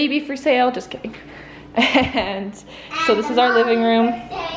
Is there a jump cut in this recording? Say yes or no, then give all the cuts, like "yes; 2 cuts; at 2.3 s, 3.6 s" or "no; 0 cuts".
no; 0 cuts